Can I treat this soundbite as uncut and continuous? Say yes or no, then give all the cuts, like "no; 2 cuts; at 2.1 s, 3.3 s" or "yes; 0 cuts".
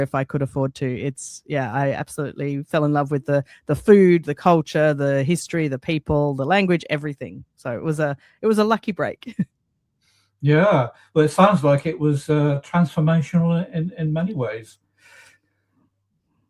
yes; 0 cuts